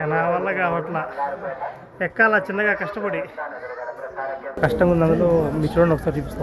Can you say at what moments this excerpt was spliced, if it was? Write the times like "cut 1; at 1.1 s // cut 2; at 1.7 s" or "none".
cut 1; at 4.6 s